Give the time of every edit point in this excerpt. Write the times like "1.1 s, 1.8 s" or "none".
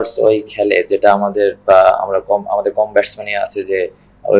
none